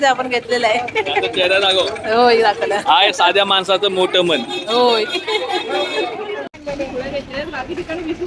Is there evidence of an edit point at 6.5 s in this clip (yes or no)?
yes